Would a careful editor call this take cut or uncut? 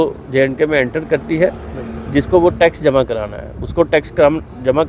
uncut